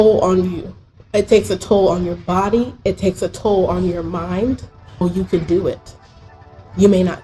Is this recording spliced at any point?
yes; 1 cut; at 5.0 s

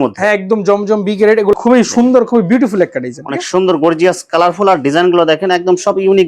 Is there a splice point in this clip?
yes; 1 cut; at 1.5 s

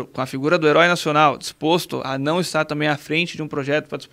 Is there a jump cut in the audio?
no; 0 cuts

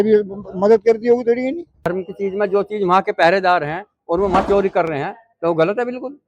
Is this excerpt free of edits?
no; 1 cut; at 1.9 s

